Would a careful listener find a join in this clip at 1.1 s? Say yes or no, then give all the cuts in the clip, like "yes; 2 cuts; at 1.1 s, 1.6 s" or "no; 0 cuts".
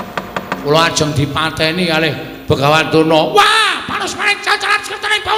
no; 0 cuts